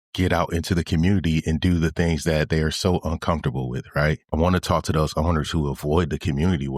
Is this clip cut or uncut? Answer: cut